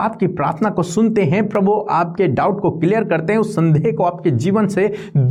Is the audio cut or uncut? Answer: uncut